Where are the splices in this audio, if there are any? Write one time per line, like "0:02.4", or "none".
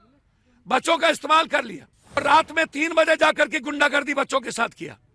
0:02.2